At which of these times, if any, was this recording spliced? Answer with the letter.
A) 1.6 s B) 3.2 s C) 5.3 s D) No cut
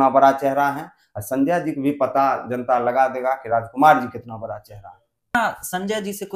C